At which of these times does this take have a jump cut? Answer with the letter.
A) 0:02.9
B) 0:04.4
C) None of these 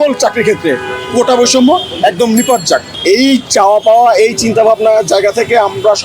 A